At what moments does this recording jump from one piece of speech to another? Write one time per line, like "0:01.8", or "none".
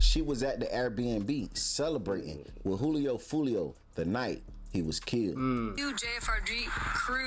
0:05.8